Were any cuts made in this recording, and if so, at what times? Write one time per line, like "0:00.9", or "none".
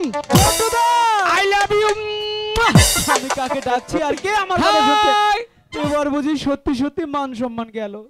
0:05.6